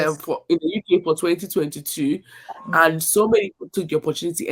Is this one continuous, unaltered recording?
yes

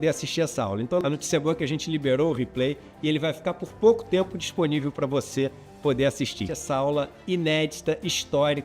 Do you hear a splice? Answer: yes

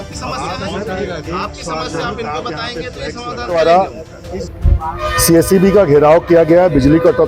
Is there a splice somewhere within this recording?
yes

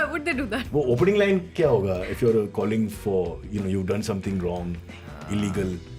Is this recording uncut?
yes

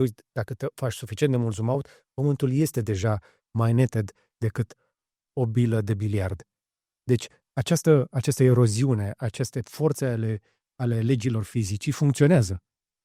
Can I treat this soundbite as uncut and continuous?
yes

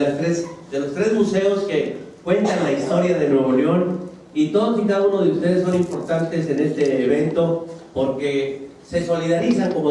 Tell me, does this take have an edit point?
yes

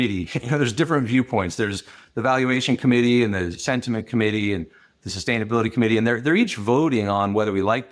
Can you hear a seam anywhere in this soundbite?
no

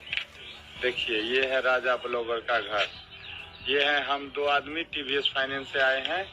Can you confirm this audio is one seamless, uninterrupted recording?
yes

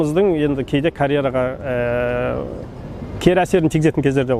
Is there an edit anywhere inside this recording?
no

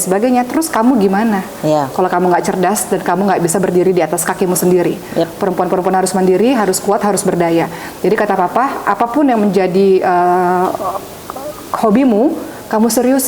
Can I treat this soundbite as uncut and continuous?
yes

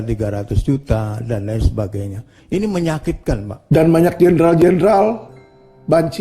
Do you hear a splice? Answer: yes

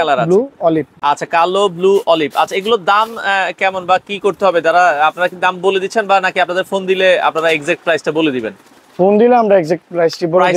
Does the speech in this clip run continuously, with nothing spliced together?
yes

